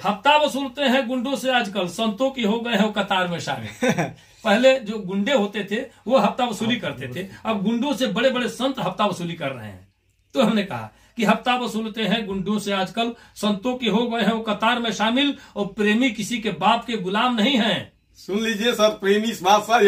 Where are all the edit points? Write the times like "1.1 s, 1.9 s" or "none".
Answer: none